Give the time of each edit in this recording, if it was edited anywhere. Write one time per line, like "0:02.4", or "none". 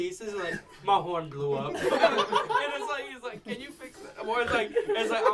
none